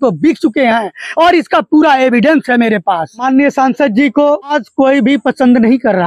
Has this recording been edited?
yes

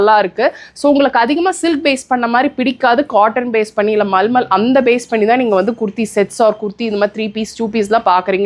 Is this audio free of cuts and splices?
yes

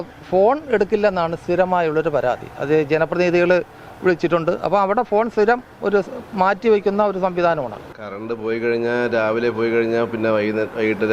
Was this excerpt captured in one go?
no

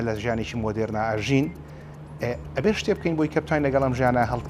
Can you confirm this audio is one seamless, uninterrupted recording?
yes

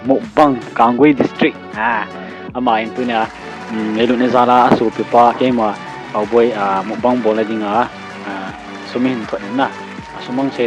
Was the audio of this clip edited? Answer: no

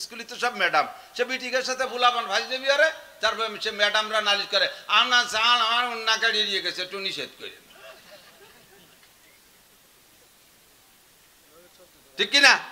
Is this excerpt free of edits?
yes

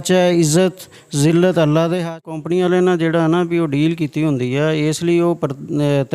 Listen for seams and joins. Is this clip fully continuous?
no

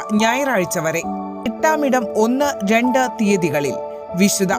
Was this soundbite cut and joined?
yes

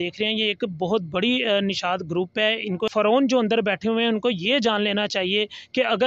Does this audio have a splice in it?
yes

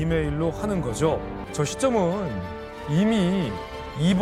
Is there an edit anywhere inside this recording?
yes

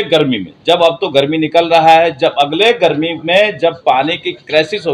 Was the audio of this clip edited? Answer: no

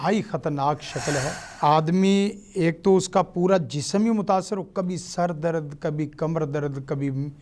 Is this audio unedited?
no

